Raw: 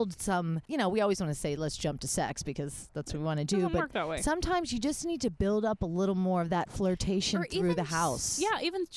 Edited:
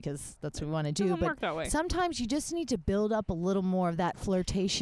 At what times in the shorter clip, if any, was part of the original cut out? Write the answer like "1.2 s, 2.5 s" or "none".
none